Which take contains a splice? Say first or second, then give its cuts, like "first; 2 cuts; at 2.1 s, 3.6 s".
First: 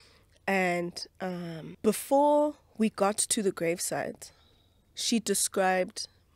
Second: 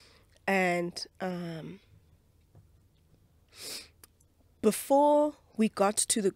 first; 1 cut; at 1.6 s